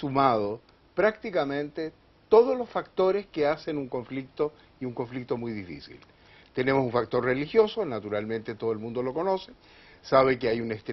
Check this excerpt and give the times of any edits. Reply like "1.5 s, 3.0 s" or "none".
none